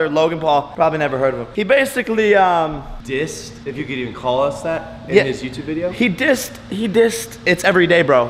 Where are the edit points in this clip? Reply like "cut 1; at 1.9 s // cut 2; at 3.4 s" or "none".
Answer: none